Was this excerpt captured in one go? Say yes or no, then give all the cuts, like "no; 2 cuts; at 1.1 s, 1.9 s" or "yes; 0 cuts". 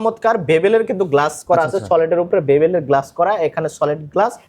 yes; 0 cuts